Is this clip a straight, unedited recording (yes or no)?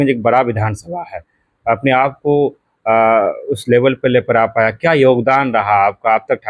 yes